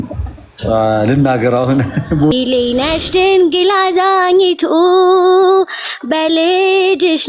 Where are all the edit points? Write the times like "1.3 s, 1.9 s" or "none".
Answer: 2.3 s